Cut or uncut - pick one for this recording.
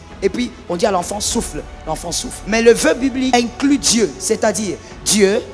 cut